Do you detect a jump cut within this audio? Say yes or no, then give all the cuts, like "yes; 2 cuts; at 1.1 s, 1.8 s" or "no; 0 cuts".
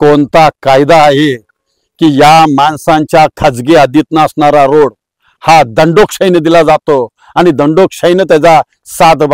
no; 0 cuts